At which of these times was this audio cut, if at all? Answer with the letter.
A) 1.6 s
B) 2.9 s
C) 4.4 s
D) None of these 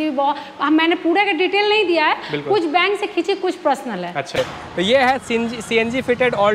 C